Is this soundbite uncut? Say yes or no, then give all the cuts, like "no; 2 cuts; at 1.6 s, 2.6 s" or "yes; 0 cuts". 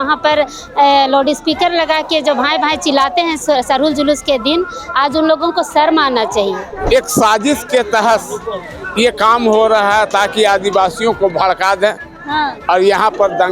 no; 1 cut; at 6.7 s